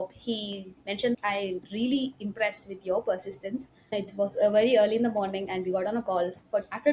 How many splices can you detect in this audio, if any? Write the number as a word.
two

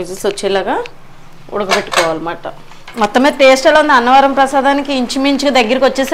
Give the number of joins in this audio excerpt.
one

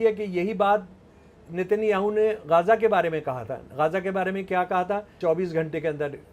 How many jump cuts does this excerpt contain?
one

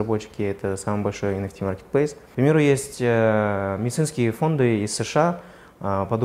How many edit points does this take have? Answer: one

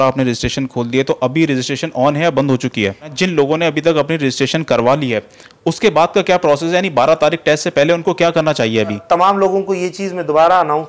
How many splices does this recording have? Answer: two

